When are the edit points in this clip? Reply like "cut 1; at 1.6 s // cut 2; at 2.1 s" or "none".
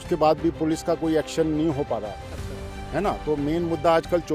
none